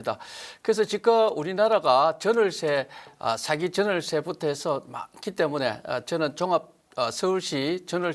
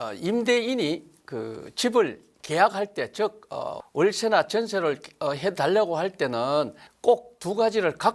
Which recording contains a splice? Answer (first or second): second